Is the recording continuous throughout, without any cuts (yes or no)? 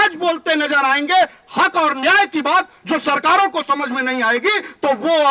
yes